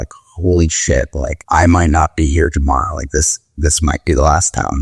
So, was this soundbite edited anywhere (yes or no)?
yes